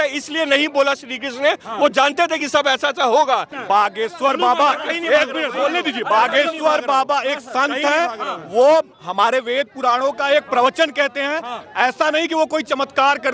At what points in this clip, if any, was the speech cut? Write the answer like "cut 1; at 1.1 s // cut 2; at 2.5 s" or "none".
cut 1; at 3.6 s